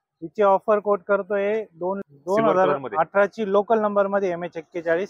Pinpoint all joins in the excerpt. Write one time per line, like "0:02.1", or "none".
0:02.0